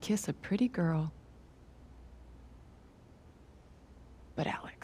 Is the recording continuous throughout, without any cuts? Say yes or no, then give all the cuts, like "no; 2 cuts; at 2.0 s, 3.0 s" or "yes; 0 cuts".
no; 2 cuts; at 1.5 s, 3.8 s